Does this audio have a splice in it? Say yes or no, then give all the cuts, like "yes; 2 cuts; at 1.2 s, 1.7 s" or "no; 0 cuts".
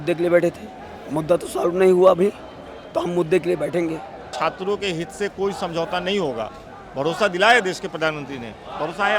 yes; 1 cut; at 4.3 s